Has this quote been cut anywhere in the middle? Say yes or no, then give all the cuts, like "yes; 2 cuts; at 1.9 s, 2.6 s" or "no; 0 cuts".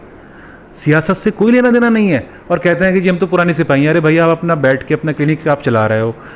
no; 0 cuts